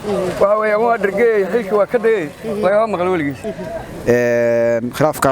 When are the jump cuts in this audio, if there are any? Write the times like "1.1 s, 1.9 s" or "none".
3.4 s